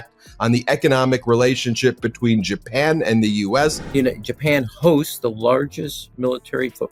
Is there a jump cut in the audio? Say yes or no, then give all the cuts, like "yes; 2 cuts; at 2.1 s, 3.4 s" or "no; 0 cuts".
yes; 1 cut; at 3.8 s